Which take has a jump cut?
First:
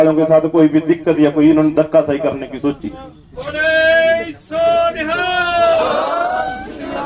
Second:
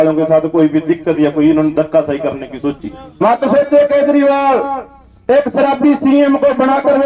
second; 1 cut; at 3.2 s

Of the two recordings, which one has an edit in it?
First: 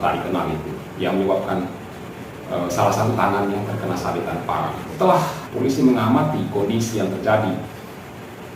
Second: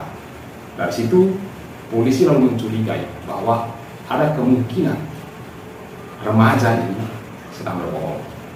first; 2 cuts; at 4.9 s, 5.4 s

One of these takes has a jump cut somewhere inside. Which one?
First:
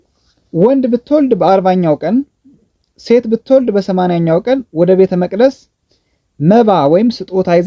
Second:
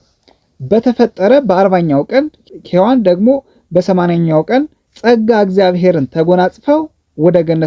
second; 1 cut; at 4.8 s

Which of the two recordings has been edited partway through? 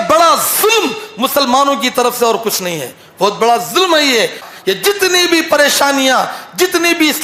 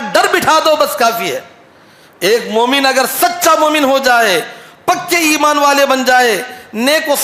first; 1 cut; at 4.5 s

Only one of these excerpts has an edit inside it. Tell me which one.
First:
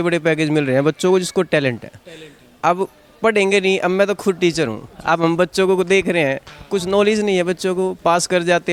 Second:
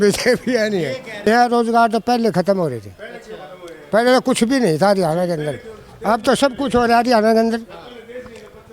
second; 1 cut; at 1.3 s

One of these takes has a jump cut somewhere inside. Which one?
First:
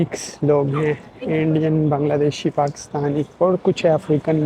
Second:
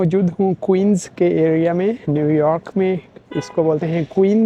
first; 1 cut; at 3.3 s

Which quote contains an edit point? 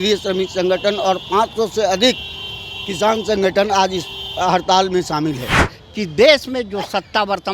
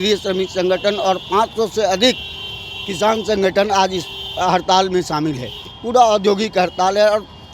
first; 1 cut; at 5.8 s

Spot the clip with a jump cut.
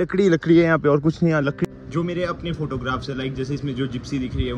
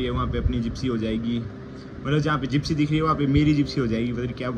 first; 1 cut; at 1.7 s

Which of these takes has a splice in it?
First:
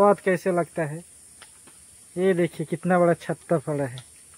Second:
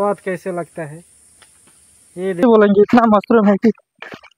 second; 1 cut; at 2.4 s

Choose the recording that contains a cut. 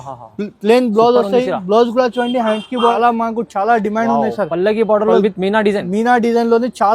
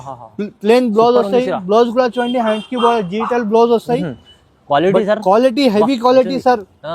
first; 1 cut; at 3.0 s

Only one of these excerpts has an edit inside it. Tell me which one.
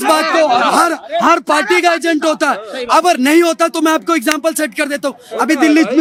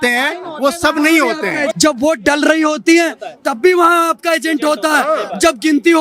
second; 1 cut; at 1.7 s

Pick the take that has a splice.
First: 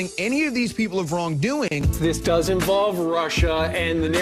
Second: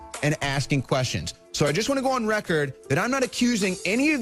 first; 1 cut; at 2.0 s

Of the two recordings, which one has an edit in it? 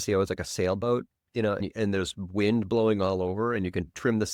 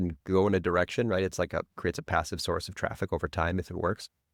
first; 1 cut; at 1.6 s

